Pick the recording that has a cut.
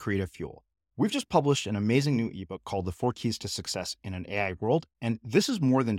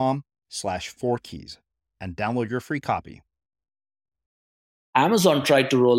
second; 1 cut; at 4.7 s

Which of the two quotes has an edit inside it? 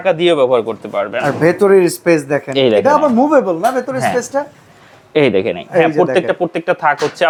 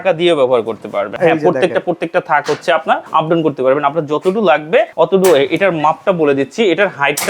second; 3 cuts; at 1.1 s, 3.0 s, 4.9 s

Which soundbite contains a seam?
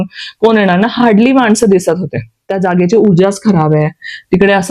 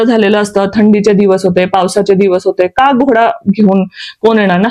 first; 1 cut; at 2.5 s

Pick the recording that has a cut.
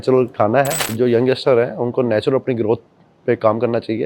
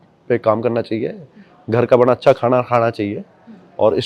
first; 1 cut; at 0.9 s

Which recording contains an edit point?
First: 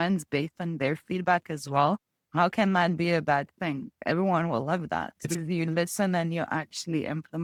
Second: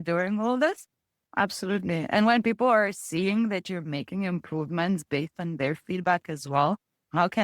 second; 1 cut; at 1.2 s

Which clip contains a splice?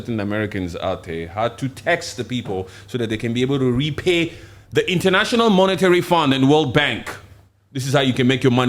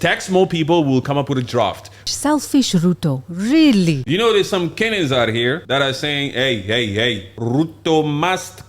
second; 4 cuts; at 2.0 s, 4.3 s, 5.6 s, 7.3 s

